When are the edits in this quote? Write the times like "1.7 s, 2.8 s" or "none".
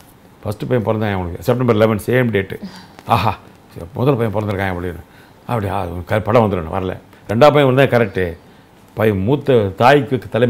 none